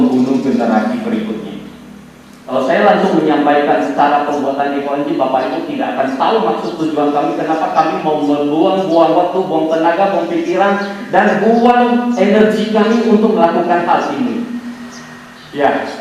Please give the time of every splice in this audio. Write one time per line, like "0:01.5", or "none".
0:02.4